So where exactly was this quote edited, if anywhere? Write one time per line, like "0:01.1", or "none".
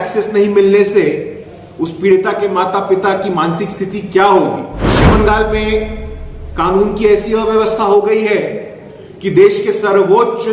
0:05.0